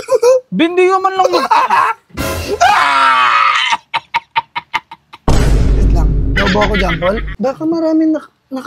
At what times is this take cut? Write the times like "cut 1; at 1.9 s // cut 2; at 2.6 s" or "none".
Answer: cut 1; at 7.3 s